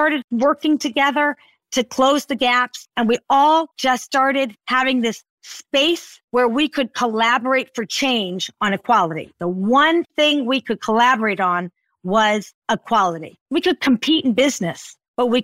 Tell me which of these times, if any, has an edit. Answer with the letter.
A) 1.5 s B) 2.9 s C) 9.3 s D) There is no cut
B